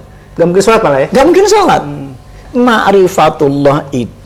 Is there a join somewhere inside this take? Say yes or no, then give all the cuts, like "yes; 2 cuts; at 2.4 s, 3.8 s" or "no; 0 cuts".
yes; 1 cut; at 2.4 s